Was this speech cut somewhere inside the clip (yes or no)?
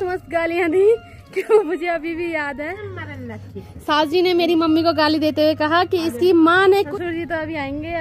yes